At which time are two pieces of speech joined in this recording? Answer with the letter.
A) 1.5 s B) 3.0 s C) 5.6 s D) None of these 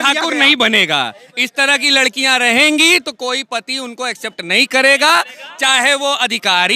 D